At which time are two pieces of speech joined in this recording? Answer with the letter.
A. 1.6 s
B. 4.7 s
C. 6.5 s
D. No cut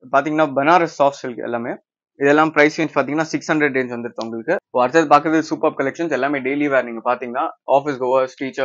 B